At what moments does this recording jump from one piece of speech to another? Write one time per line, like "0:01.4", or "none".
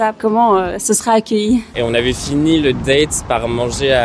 0:01.7